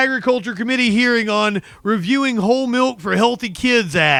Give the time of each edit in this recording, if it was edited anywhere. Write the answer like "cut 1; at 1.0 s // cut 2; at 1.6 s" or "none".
none